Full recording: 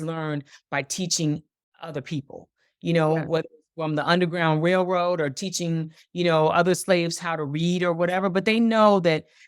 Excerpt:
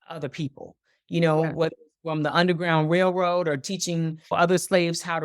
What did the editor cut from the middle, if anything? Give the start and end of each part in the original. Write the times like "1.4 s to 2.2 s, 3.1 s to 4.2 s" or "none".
6.1 s to 6.5 s